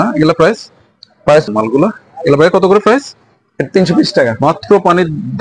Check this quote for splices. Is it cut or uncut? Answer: cut